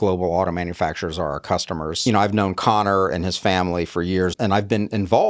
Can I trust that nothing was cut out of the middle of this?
no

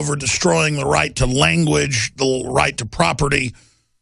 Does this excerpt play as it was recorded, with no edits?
no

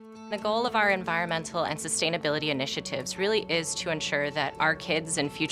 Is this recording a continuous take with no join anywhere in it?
yes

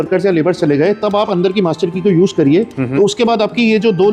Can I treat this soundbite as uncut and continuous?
yes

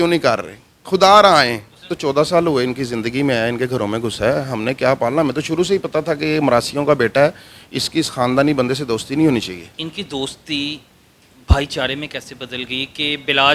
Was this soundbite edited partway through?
yes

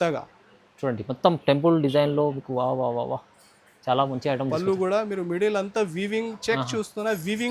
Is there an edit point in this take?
no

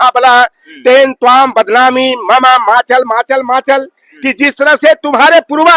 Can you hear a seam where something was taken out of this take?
no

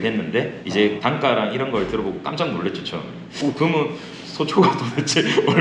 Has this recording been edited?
yes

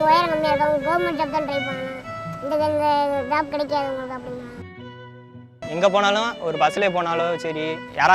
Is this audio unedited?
no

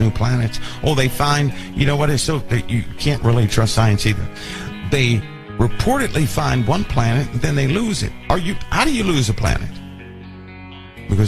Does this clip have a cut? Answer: no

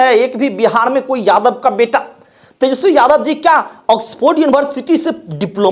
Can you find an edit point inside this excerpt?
no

